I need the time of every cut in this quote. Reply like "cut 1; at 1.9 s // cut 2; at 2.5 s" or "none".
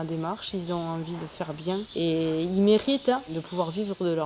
cut 1; at 1.9 s // cut 2; at 3.4 s